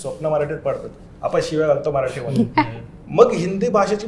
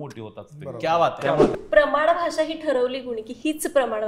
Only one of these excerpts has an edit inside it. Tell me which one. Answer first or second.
second